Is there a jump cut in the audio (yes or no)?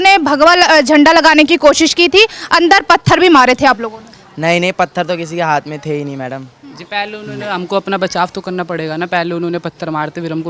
no